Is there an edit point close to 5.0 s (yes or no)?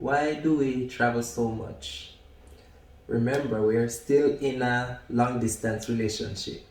no